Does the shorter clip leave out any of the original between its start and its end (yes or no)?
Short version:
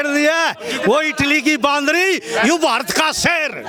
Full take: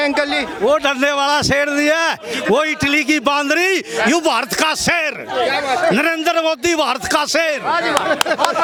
no